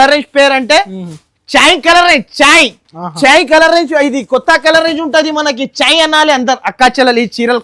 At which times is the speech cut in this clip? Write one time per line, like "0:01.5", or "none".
none